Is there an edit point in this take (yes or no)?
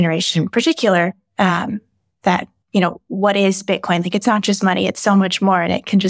no